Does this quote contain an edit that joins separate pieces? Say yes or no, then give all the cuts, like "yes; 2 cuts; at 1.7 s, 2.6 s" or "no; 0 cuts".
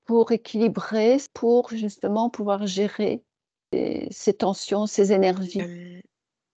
yes; 3 cuts; at 1.3 s, 3.7 s, 5.6 s